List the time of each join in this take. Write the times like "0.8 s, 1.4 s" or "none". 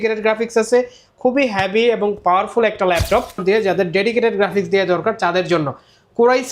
3.4 s